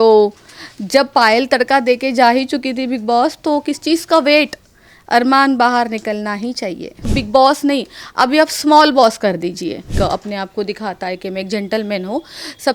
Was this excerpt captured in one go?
no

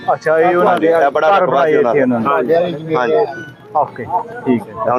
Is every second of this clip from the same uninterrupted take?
yes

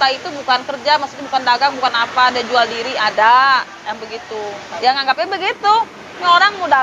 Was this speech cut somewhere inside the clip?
yes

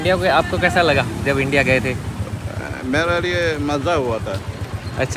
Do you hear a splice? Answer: no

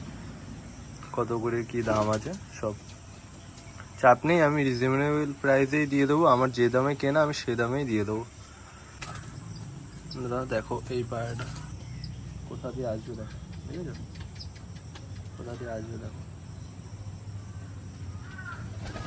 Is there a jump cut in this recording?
yes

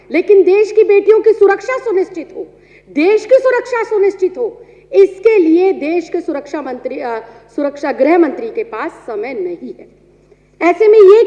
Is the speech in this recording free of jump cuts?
yes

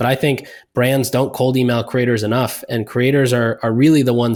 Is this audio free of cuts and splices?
yes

